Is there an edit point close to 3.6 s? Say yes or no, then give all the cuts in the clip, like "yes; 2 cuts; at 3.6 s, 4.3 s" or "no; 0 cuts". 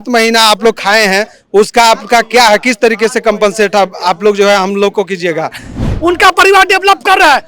no; 1 cut; at 5.9 s